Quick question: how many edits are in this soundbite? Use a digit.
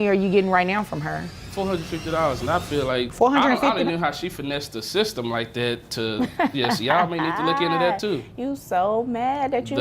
2